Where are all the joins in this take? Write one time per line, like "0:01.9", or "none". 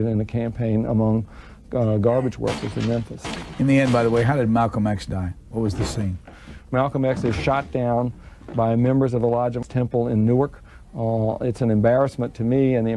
0:06.4
0:09.7